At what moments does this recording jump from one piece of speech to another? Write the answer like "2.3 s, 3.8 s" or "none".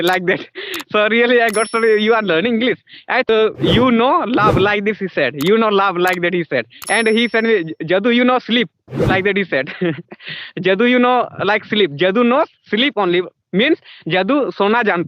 3.3 s

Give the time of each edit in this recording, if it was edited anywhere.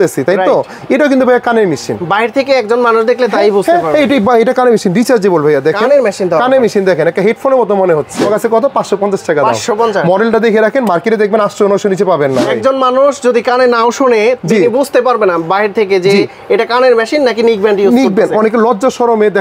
8.2 s, 12.5 s

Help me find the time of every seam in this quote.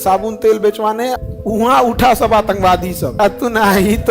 1.2 s, 3.2 s

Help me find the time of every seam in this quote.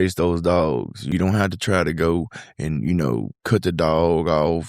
1.0 s

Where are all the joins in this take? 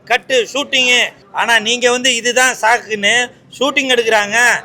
1.2 s

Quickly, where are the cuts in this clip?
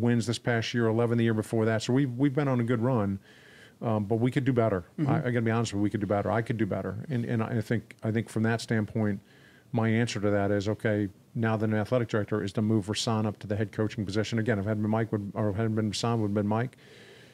none

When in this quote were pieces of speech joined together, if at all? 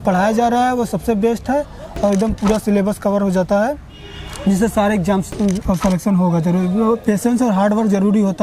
5.6 s

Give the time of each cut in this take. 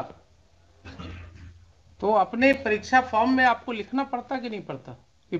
none

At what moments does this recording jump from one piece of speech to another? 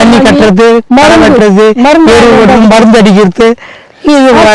none

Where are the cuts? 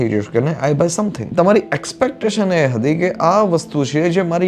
1.3 s

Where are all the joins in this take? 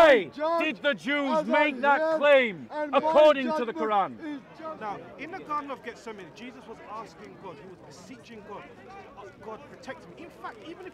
4.5 s

